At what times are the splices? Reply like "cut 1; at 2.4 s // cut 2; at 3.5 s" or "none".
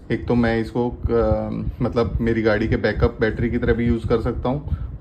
none